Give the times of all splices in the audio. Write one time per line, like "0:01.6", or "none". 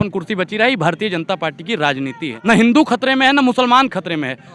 0:02.3